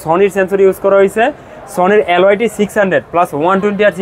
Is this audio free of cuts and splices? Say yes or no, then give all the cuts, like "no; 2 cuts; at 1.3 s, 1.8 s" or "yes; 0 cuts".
yes; 0 cuts